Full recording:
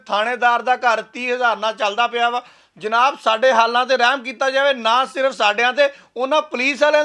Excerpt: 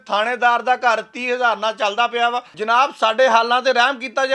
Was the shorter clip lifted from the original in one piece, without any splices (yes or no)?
no